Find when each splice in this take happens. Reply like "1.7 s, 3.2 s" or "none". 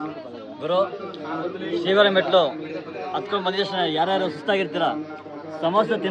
none